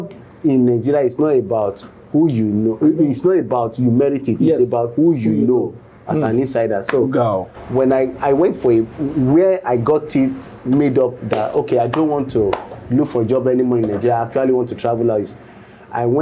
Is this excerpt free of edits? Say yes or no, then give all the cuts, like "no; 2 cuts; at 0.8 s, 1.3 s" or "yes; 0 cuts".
yes; 0 cuts